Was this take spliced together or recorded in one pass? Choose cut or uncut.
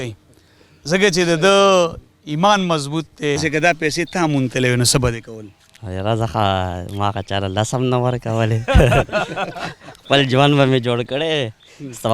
cut